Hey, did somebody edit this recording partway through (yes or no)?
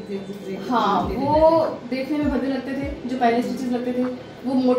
no